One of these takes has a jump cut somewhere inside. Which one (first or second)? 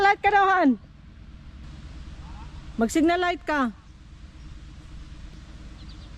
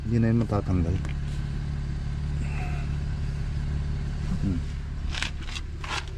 first